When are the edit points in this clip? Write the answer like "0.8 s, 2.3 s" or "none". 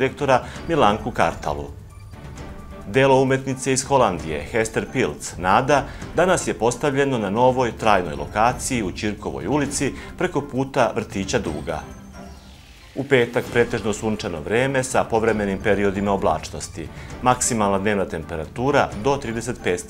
none